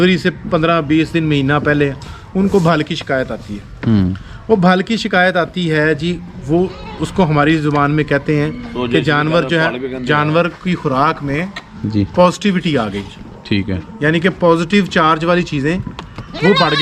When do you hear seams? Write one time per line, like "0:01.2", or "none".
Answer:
none